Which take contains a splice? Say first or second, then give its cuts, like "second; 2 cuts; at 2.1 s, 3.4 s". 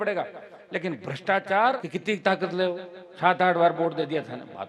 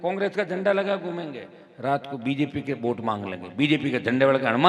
first; 1 cut; at 1.9 s